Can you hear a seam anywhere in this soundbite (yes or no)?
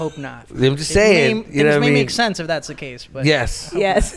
no